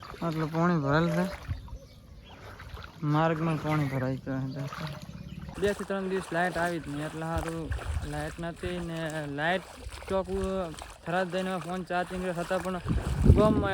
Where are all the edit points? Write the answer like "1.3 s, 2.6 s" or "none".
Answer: 5.4 s